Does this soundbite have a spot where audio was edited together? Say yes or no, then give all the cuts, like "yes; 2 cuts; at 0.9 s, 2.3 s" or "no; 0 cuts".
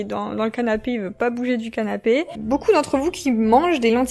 yes; 1 cut; at 2.3 s